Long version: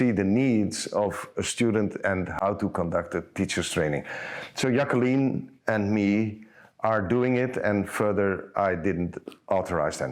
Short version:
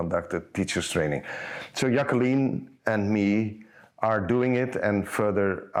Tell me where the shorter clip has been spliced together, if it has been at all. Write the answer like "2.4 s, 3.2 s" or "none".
none